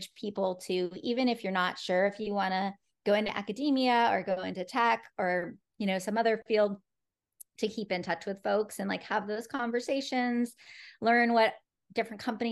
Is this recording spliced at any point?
no; 0 cuts

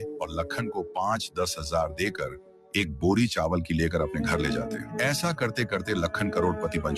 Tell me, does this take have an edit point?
yes; 1 cut; at 2.6 s

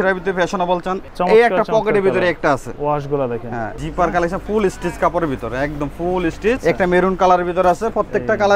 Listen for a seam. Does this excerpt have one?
yes; 3 cuts; at 1.0 s, 3.8 s, 6.6 s

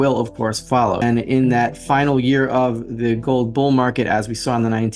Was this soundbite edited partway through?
yes; 1 cut; at 1.0 s

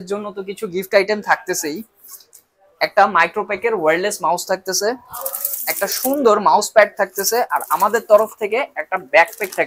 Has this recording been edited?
no; 0 cuts

